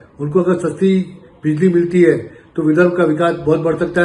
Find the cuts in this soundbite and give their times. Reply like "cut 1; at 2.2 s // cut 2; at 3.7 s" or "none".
none